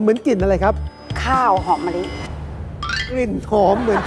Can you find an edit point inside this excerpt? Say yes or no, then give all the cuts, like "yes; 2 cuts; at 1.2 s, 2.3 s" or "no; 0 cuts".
no; 0 cuts